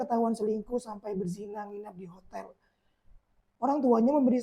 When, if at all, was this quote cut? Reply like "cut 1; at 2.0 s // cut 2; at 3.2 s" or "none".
cut 1; at 3.4 s

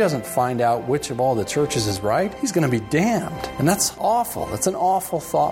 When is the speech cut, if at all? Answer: cut 1; at 2.3 s // cut 2; at 3.6 s

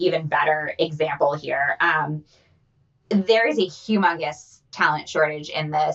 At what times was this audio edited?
none

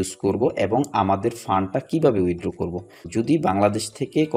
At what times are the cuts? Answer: cut 1; at 3.0 s

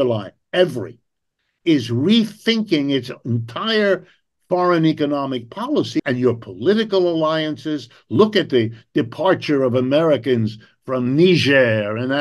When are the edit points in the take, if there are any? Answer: cut 1; at 6.0 s

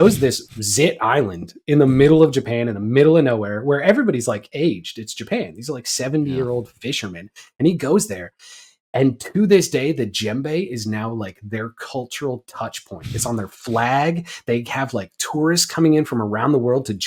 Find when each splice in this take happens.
none

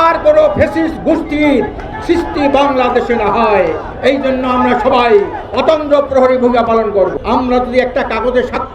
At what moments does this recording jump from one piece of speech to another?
cut 1; at 7.1 s

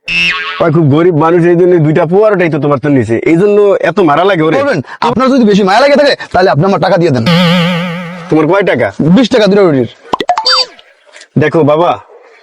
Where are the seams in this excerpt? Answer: cut 1; at 4.6 s

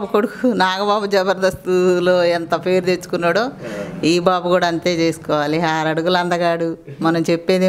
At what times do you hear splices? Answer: none

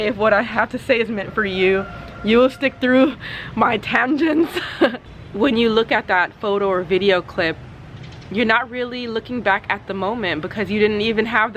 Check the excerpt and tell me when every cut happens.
cut 1; at 5.1 s

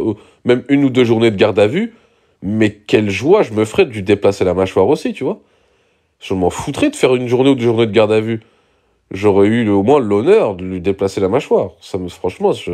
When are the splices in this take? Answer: none

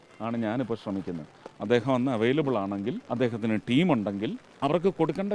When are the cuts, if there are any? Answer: cut 1; at 3.0 s // cut 2; at 4.4 s

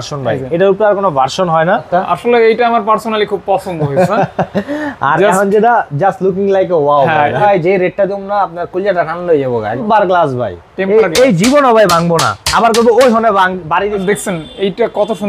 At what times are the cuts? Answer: cut 1; at 1.9 s // cut 2; at 7.4 s // cut 3; at 9.8 s // cut 4; at 14.0 s

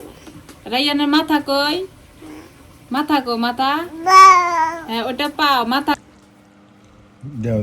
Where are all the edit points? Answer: cut 1; at 5.9 s

